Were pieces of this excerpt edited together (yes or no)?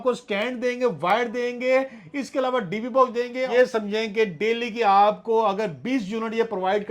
yes